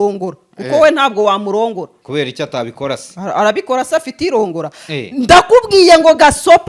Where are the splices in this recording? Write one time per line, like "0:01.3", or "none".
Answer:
none